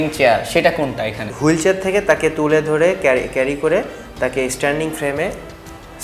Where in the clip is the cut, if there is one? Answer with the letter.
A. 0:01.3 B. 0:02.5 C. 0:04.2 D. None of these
A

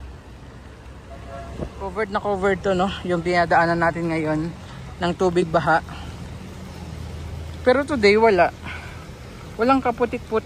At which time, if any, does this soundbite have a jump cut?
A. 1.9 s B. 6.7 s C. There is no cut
A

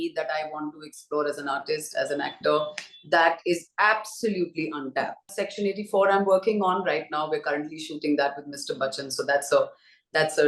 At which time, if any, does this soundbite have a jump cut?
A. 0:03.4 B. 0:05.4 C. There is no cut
B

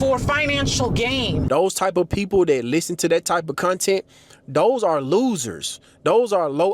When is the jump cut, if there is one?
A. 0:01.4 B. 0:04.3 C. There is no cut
A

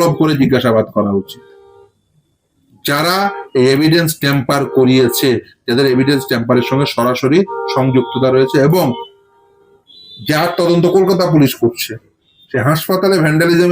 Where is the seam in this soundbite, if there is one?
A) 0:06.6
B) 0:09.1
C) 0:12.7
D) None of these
B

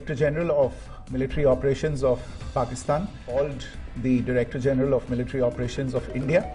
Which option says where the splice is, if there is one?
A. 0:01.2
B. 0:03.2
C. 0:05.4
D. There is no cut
B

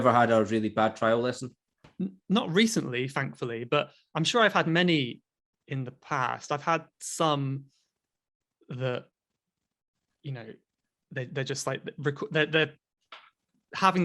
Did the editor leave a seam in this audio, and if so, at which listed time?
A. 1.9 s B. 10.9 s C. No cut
A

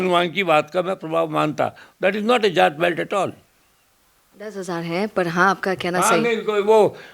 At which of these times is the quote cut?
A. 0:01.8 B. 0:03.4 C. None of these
C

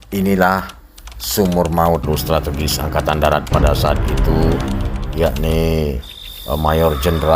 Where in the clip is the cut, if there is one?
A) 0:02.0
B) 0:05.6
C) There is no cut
A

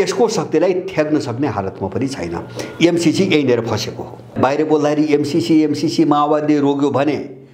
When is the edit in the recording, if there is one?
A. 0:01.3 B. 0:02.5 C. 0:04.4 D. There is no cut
C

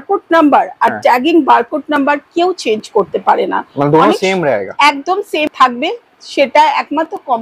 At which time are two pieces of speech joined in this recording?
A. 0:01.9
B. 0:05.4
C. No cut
B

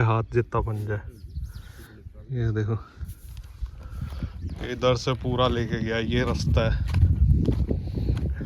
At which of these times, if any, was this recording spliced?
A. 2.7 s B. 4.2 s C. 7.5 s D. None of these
D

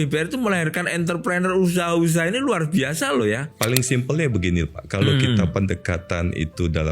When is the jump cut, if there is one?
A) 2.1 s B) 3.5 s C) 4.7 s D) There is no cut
B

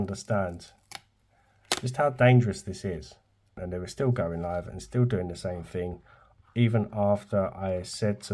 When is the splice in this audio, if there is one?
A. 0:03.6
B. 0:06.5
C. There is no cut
A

